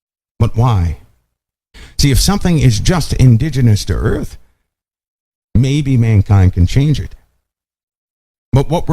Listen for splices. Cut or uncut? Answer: cut